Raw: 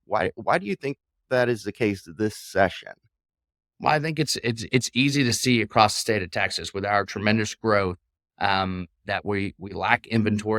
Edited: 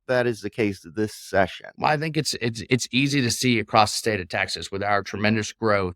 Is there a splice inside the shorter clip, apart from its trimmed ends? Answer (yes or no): yes